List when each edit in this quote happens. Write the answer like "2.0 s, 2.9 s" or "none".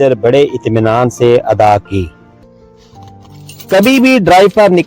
2.5 s